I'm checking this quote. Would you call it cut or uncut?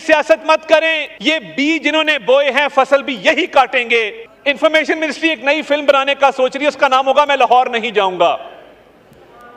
cut